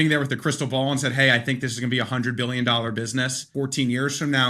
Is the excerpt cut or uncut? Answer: cut